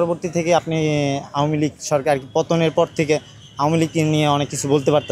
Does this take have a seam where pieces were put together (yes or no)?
no